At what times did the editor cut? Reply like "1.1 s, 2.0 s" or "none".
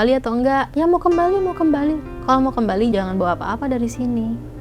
2.1 s, 2.9 s